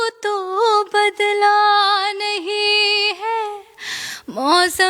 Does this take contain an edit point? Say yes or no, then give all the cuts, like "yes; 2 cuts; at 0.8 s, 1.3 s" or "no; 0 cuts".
no; 0 cuts